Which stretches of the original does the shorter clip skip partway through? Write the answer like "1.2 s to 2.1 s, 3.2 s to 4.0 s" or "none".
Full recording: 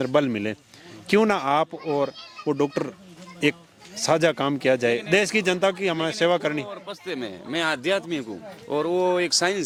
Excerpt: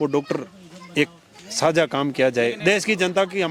none